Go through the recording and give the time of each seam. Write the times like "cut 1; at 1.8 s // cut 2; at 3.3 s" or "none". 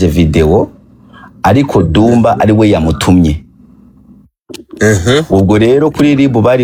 none